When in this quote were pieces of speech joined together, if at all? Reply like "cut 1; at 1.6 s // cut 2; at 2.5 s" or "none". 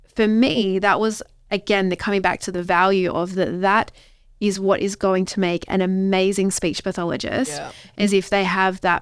none